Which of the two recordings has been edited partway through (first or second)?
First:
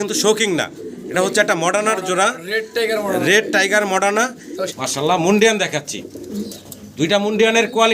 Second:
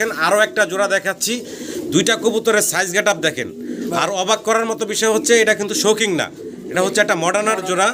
first